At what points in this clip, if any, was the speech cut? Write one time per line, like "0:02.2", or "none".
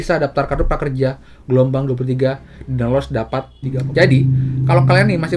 0:03.6

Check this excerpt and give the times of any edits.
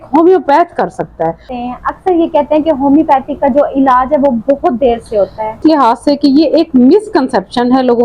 0:01.5
0:05.6

